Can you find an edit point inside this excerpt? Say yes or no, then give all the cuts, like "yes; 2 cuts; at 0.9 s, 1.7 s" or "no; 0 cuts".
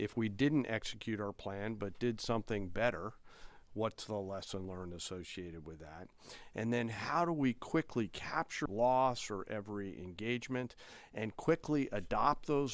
yes; 1 cut; at 8.6 s